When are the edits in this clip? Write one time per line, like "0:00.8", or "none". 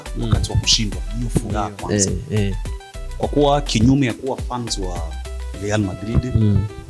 0:01.5